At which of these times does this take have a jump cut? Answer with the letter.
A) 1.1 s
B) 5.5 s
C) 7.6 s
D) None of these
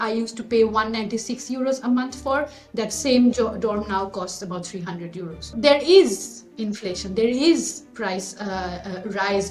B